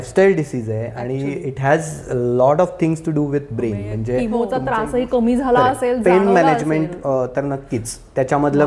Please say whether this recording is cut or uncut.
cut